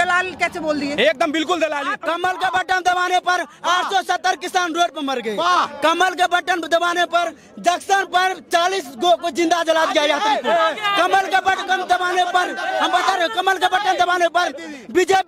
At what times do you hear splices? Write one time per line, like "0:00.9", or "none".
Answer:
0:02.0